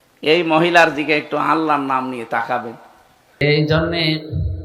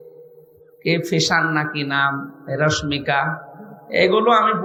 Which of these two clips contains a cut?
first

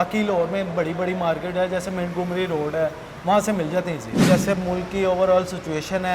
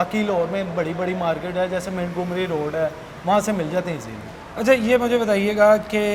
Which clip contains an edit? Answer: first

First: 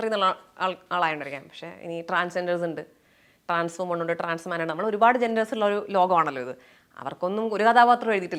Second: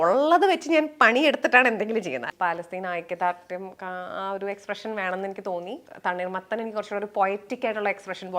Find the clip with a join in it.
second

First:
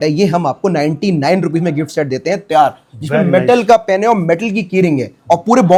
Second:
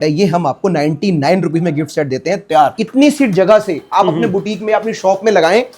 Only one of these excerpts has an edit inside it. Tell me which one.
second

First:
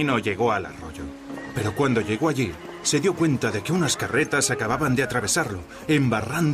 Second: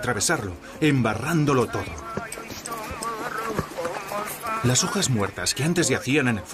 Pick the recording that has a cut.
second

